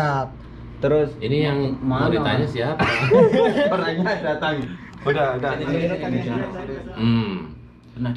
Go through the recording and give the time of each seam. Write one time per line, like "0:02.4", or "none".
0:06.6